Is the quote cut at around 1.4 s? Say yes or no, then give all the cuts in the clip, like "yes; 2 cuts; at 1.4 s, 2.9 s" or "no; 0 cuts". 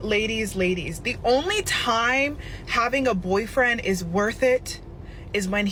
no; 0 cuts